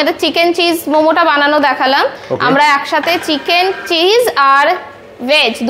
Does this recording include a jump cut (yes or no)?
no